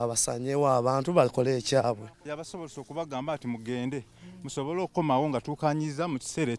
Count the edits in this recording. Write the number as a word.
one